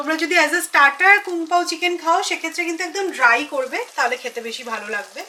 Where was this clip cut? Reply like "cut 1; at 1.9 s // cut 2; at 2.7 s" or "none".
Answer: none